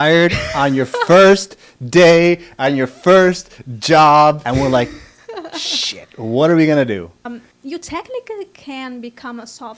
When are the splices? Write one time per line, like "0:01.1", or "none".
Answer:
0:04.4
0:07.4